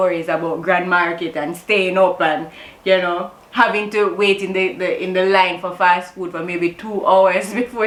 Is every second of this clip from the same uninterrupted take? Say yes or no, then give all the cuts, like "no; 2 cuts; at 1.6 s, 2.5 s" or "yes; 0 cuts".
yes; 0 cuts